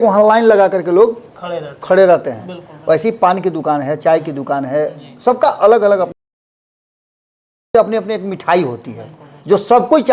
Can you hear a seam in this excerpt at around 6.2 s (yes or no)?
no